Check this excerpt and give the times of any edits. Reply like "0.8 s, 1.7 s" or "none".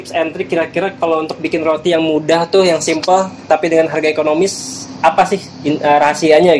none